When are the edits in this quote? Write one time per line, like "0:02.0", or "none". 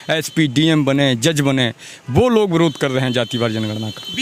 none